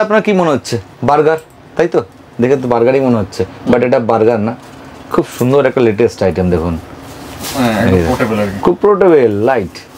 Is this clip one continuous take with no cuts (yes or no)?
yes